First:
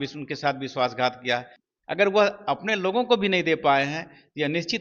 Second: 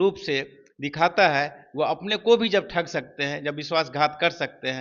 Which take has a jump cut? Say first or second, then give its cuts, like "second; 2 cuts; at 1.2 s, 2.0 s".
first; 1 cut; at 1.6 s